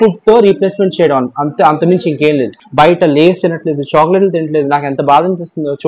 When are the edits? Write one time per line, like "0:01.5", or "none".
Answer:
0:02.6